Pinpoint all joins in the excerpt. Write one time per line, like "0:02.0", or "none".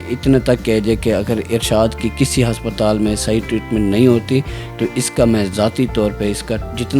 none